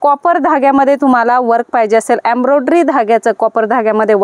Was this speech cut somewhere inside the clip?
no; 0 cuts

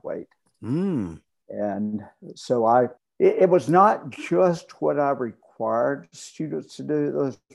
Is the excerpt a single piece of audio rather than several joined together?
no; 1 cut; at 3.0 s

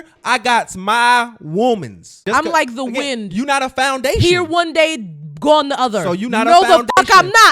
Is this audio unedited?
no; 1 cut; at 2.2 s

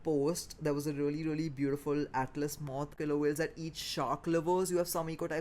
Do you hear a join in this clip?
yes; 1 cut; at 2.9 s

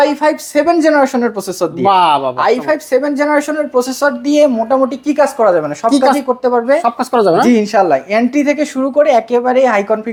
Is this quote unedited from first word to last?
yes; 0 cuts

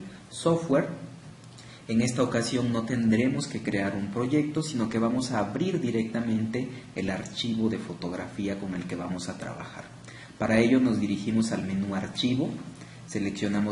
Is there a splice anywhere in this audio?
no; 0 cuts

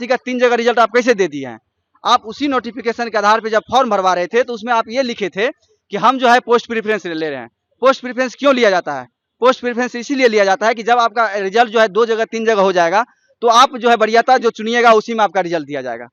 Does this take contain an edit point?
no; 0 cuts

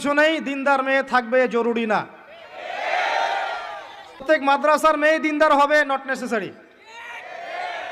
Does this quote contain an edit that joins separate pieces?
yes; 1 cut; at 4.2 s

